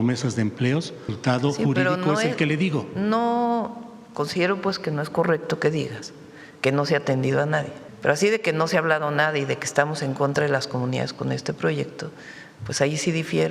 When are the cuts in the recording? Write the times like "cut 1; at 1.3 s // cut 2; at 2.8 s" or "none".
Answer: cut 1; at 1.1 s // cut 2; at 7.8 s